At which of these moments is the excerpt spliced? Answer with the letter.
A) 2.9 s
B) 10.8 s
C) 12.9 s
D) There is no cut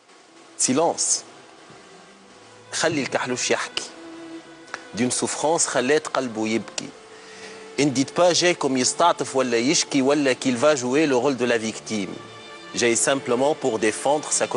D